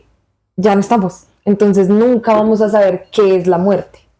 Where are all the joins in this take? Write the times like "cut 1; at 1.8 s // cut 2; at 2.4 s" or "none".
none